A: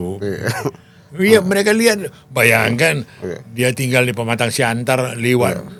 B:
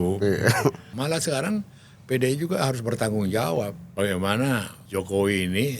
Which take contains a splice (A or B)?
B